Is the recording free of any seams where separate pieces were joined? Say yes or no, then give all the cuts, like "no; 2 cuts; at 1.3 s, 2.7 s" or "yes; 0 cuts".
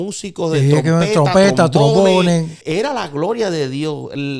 no; 1 cut; at 2.6 s